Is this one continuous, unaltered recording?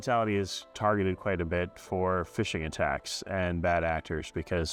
yes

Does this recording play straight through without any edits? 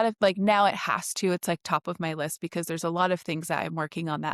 yes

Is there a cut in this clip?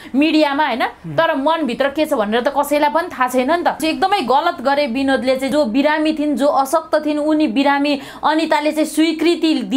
yes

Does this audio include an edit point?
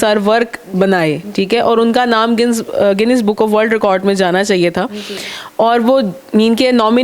no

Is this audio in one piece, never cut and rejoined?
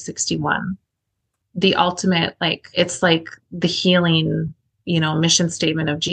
no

